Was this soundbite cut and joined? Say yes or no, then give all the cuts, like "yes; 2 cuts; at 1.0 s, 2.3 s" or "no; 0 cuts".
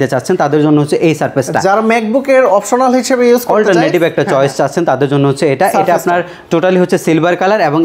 no; 0 cuts